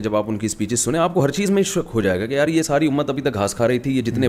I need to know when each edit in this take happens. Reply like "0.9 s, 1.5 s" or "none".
none